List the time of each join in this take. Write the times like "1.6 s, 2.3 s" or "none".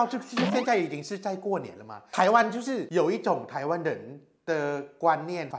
2.1 s